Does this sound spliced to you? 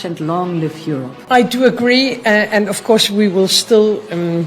yes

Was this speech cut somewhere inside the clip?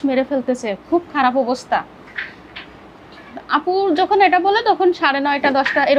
no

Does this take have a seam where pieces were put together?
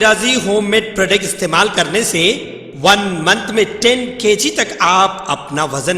no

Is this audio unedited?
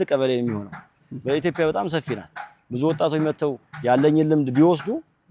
yes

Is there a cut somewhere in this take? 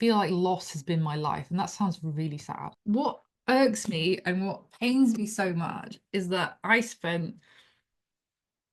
yes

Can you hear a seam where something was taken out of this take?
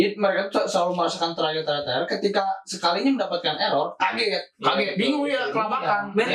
no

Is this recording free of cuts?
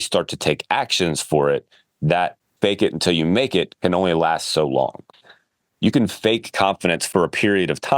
no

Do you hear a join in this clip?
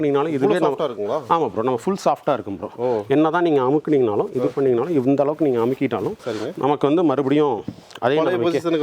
no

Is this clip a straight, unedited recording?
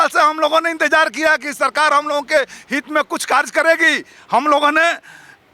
yes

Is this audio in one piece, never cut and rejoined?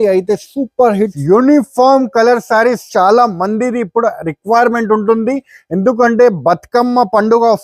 no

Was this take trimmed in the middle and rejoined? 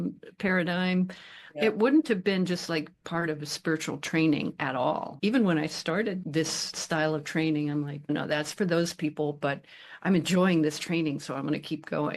no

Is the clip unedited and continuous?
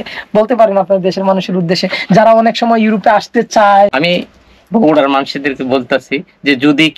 no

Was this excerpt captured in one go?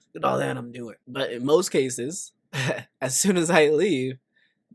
yes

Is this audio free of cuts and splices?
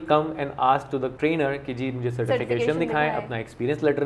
no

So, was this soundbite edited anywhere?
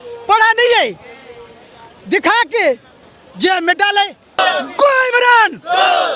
yes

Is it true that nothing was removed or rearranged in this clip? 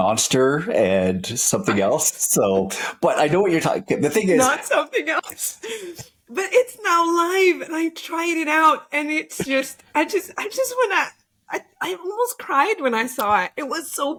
yes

